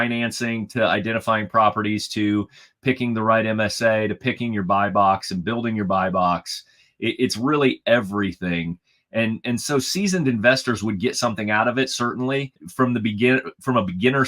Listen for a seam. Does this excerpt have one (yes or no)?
yes